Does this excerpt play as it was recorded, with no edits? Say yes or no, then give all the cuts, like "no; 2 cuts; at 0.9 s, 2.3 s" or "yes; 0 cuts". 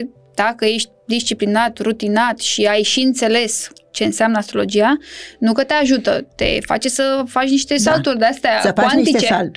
yes; 0 cuts